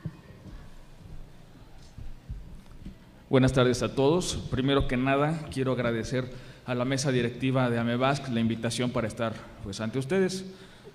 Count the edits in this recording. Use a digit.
1